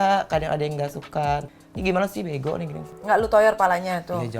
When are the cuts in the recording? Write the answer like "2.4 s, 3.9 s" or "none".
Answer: 1.6 s, 2.9 s